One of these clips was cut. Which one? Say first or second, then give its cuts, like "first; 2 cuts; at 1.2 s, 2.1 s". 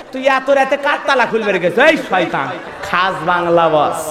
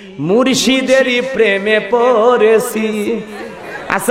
first; 1 cut; at 2.7 s